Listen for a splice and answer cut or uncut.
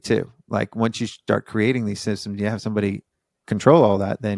uncut